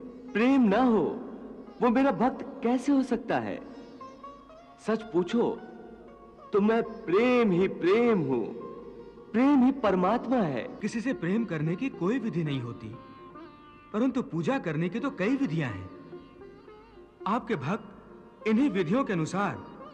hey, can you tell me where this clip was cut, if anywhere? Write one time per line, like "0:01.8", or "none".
0:10.9